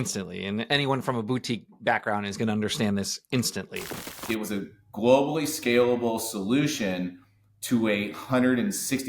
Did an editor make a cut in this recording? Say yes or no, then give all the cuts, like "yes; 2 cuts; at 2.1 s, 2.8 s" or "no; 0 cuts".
yes; 1 cut; at 4.1 s